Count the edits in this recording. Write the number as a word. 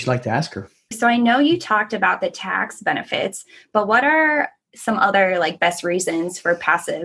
one